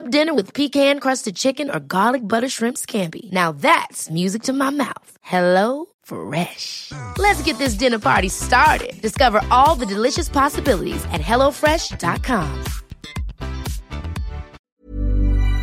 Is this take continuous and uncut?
no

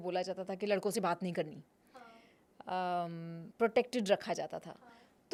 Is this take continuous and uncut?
yes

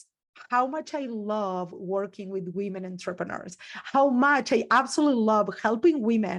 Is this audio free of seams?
yes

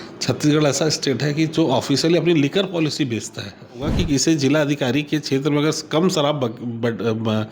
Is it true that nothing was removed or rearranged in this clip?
no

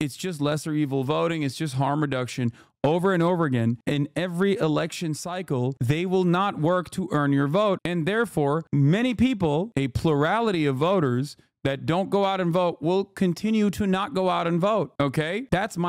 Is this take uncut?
yes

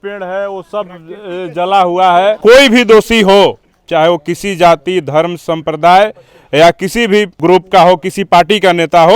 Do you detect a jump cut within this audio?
yes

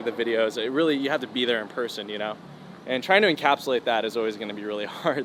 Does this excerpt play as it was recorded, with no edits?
yes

